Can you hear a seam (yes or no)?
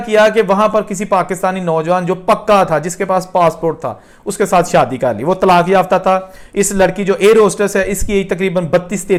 no